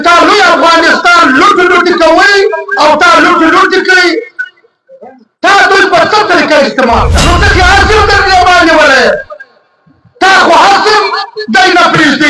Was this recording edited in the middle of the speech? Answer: yes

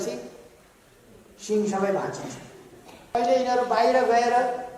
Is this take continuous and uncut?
no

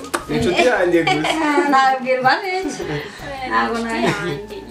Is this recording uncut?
yes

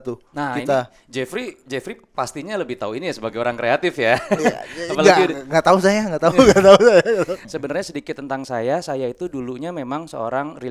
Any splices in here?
yes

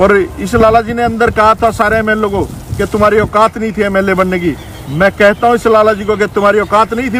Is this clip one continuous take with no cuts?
yes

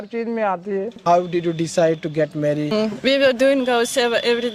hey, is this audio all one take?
no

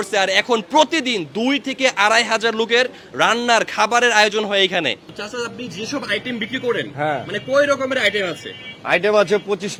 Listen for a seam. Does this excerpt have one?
no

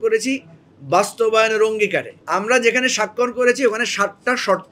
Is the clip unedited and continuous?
no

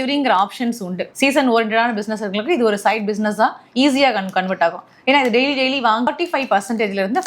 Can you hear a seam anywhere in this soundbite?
yes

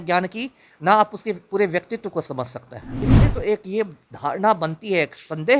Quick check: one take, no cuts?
no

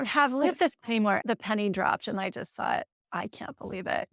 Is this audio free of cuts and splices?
yes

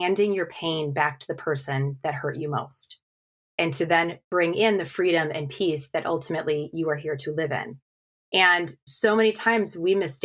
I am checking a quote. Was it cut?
no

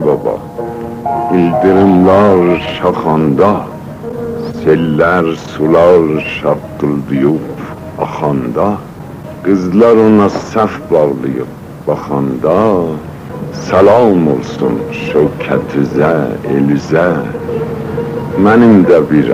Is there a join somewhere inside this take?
no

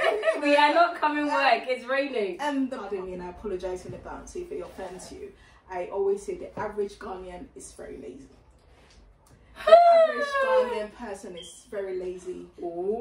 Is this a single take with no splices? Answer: no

